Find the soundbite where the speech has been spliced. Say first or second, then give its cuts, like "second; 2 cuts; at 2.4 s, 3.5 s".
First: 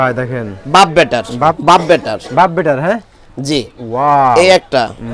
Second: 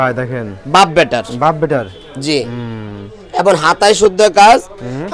first; 1 cut; at 1.6 s